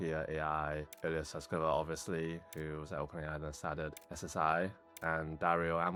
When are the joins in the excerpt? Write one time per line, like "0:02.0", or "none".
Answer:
none